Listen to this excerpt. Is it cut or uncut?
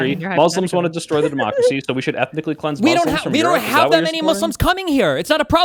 uncut